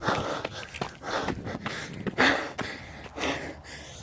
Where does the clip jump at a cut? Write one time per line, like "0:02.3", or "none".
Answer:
0:01.1
0:02.1
0:03.0